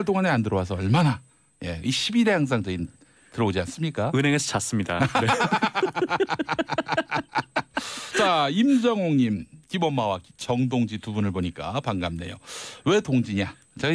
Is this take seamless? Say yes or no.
yes